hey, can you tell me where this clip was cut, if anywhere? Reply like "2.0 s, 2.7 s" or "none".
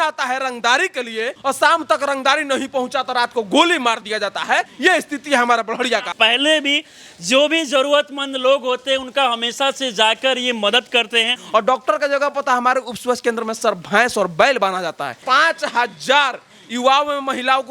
1.3 s, 4.7 s, 6.1 s, 11.4 s, 15.2 s